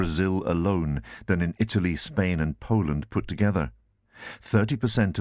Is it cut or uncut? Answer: uncut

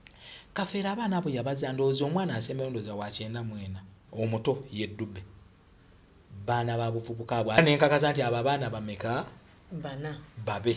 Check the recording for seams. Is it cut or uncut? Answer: cut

